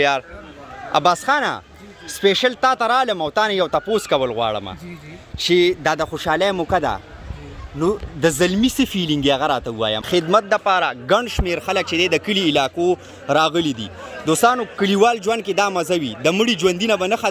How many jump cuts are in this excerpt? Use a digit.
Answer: 1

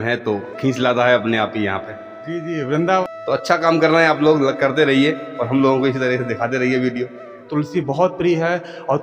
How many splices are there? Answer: 2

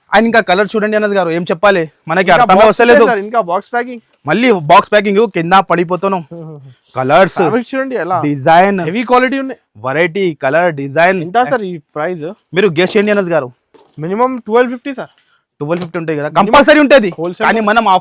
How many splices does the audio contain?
0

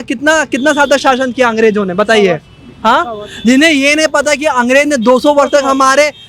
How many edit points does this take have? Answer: 0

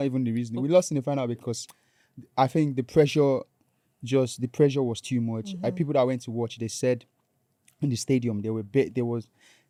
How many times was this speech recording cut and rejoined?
0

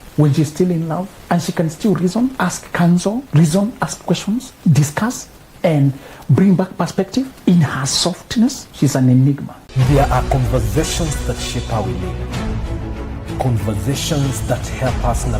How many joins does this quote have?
7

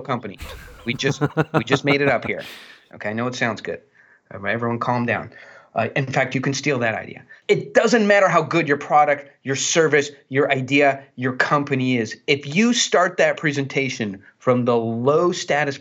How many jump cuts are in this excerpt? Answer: 1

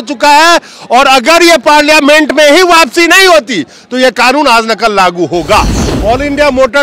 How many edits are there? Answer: 1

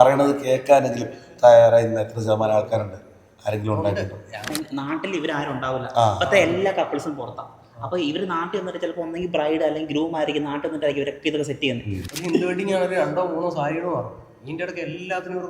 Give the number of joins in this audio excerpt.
2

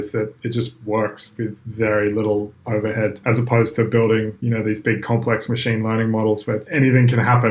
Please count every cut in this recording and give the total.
3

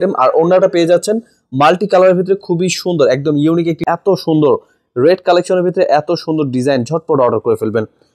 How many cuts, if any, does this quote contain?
1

